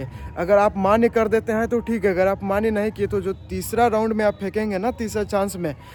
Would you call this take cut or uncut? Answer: uncut